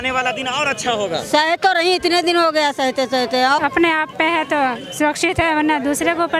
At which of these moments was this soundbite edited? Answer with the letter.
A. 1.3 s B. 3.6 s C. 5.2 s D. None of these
B